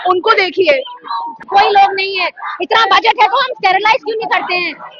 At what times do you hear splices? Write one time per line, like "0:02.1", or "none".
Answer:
0:01.4